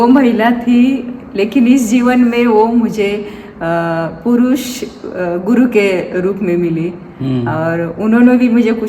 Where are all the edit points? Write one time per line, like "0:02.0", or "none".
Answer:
none